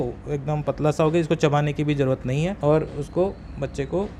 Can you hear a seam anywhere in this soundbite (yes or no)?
yes